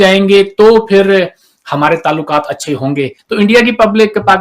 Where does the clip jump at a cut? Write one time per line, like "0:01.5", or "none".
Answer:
0:03.2